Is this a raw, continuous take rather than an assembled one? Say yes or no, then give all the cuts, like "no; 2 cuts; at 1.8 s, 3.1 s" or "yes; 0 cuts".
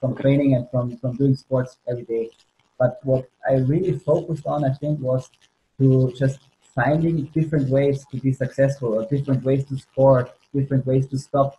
yes; 0 cuts